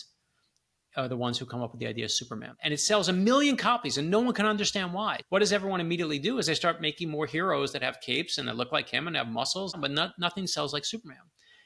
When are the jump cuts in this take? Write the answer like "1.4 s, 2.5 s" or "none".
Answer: 2.5 s, 5.2 s, 9.8 s

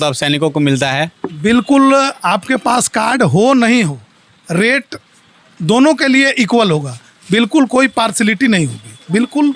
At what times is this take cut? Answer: none

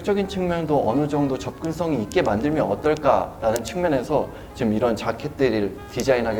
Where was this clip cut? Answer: none

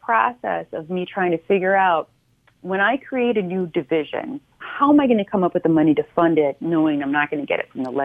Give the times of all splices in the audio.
4.6 s

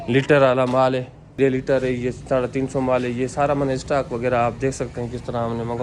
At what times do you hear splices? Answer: 1.4 s

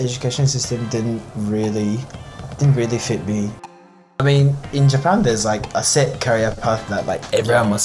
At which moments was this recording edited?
3.7 s

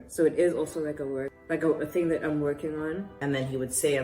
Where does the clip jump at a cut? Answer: 1.4 s, 3.1 s

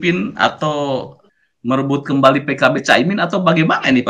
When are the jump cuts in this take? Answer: 1.2 s

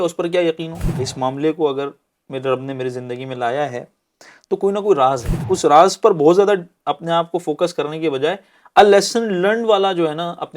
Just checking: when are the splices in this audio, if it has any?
1.1 s, 5.3 s

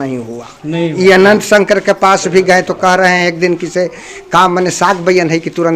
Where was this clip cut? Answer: none

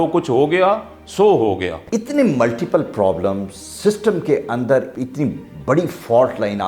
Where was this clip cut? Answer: 1.7 s, 4.9 s

